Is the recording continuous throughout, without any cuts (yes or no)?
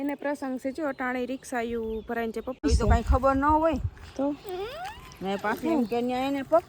no